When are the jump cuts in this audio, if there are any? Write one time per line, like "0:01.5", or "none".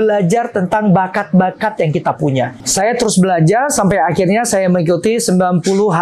0:02.7